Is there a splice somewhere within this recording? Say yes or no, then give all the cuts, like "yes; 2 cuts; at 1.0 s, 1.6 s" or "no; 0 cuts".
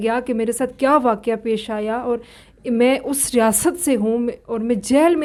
no; 0 cuts